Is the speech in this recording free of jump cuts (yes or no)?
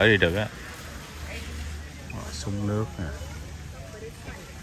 no